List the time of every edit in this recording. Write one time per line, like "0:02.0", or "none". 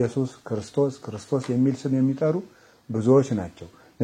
none